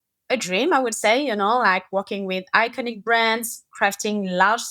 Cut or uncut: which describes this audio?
uncut